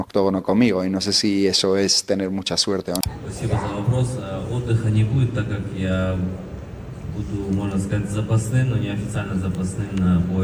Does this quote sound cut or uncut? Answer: cut